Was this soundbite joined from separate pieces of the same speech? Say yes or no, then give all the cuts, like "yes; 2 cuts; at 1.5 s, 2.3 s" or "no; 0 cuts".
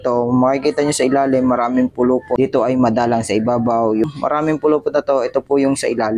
yes; 2 cuts; at 2.3 s, 4.1 s